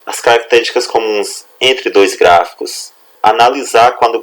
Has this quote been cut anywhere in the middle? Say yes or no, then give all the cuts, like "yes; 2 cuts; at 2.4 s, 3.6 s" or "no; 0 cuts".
yes; 1 cut; at 3.0 s